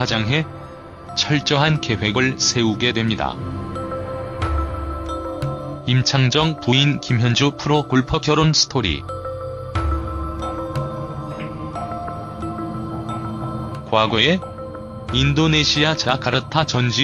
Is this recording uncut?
no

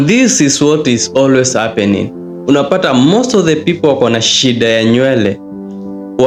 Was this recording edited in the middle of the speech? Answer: no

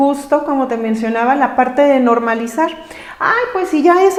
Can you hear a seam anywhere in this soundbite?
no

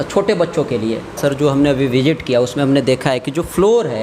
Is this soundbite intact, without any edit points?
no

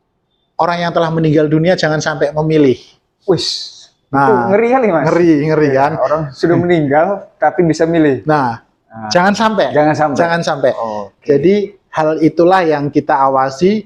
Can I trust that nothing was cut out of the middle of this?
yes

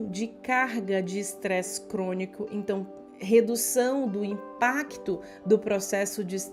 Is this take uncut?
yes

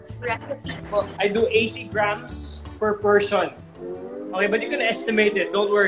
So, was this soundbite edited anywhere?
yes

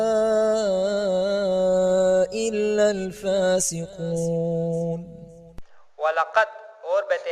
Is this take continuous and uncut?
no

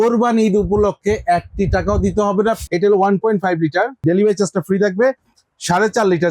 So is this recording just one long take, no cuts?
no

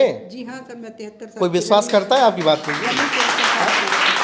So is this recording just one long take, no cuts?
yes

